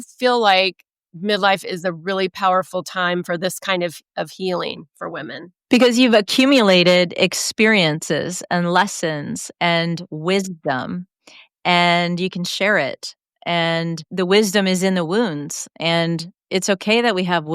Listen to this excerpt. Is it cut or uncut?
cut